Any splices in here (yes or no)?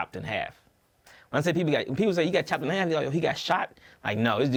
no